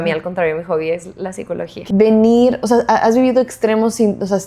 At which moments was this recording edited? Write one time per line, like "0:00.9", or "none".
0:01.7